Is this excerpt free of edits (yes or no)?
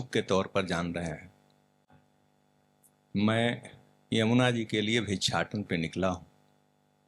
yes